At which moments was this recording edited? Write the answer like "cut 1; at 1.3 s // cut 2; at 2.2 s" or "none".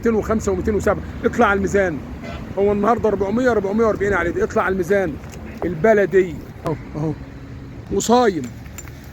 cut 1; at 7.8 s